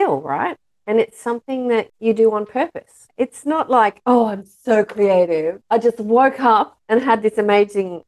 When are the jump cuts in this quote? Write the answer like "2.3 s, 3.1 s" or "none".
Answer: 1.9 s